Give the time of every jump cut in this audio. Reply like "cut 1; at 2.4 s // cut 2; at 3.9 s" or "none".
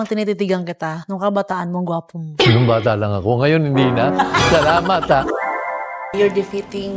cut 1; at 5.7 s